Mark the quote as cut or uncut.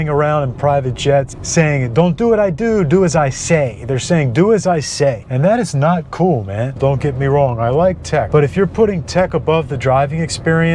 cut